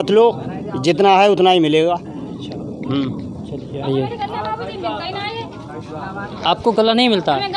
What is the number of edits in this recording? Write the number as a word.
zero